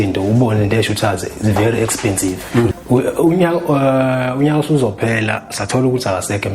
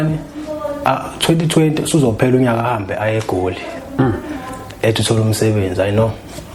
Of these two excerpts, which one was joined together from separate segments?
first; 1 cut; at 2.7 s

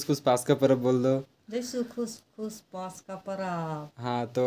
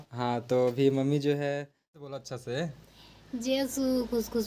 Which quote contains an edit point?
second; 1 cut; at 2.0 s

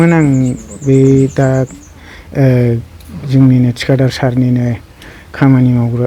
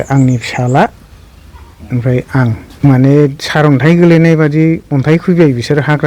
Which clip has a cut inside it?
second; 1 cut; at 2.7 s

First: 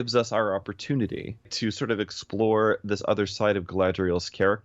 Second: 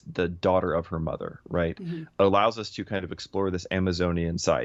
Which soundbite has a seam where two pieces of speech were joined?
first; 1 cut; at 1.5 s

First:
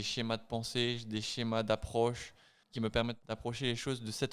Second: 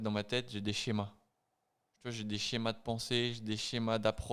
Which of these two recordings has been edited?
first; 1 cut; at 2.9 s

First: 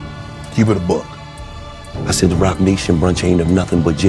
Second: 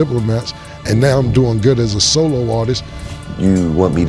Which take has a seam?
second; 1 cut; at 2.9 s

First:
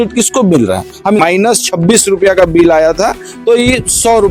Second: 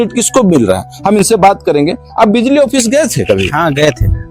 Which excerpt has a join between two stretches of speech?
first; 1 cut; at 1.2 s

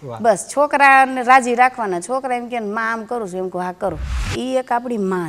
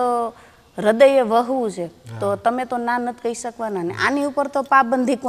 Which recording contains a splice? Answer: first; 1 cut; at 4.3 s

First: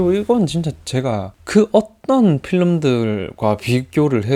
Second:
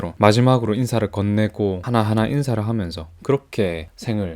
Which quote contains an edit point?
second; 1 cut; at 1.8 s

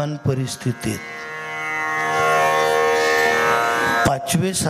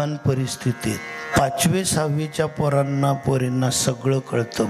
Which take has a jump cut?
second; 1 cut; at 1.3 s

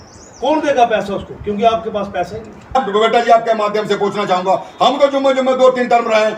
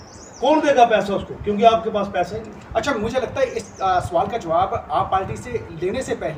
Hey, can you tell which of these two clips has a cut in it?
first; 1 cut; at 2.8 s

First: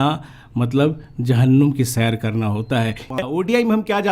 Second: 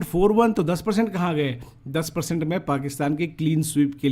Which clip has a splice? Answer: first; 1 cut; at 3.1 s

